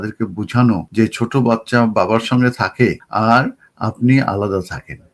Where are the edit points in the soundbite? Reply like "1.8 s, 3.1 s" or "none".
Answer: 0.9 s, 3.0 s